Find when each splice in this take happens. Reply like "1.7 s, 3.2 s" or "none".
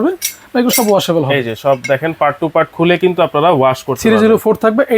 none

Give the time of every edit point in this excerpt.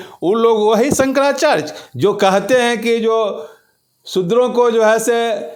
none

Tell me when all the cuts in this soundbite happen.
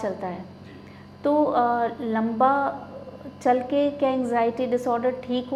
none

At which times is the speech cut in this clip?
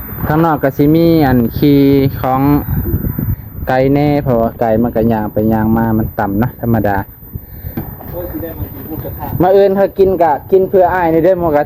7.8 s

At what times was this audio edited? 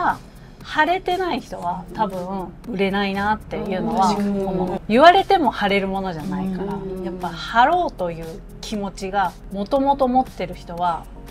2.7 s, 4.7 s, 9.4 s

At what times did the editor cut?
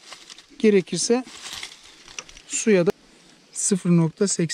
2.9 s

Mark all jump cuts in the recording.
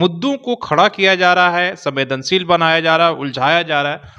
none

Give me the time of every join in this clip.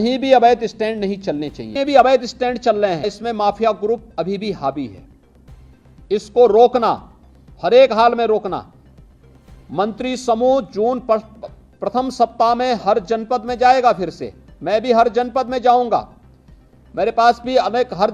1.6 s, 3.1 s

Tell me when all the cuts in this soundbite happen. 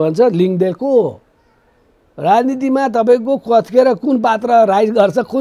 none

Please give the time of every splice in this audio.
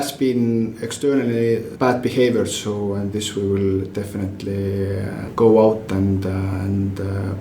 1.7 s, 5.3 s

